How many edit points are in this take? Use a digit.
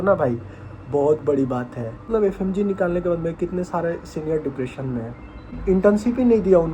2